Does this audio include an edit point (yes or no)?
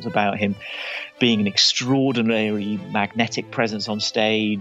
no